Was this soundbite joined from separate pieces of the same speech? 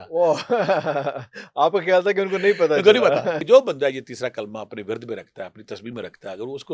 yes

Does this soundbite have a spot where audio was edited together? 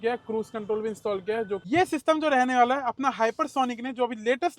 yes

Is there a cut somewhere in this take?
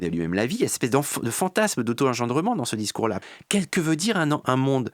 yes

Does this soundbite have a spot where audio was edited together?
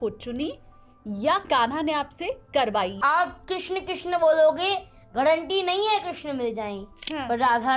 yes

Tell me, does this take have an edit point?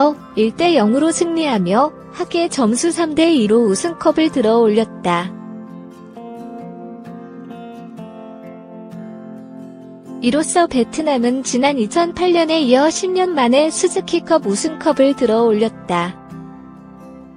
yes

